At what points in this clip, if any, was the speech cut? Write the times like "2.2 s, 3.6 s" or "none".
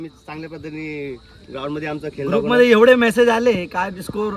none